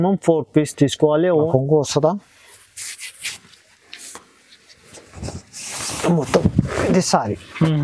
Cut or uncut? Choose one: cut